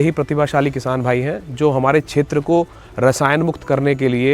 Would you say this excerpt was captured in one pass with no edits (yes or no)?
yes